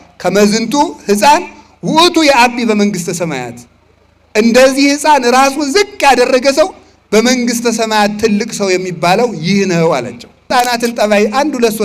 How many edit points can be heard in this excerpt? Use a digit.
1